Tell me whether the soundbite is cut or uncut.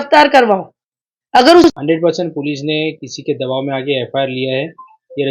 cut